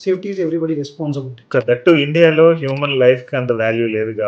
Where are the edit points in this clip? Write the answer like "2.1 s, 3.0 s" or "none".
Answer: 1.6 s